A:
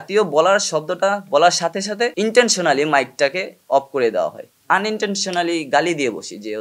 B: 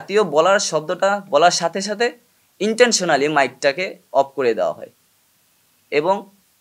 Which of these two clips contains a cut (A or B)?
A